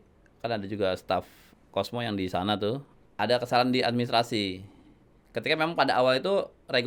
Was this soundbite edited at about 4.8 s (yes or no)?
no